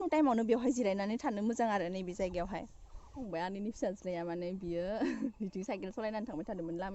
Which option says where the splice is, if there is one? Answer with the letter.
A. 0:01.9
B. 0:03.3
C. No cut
B